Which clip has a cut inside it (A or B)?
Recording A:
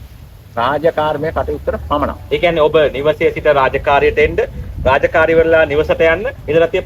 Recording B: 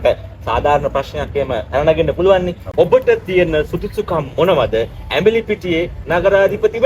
B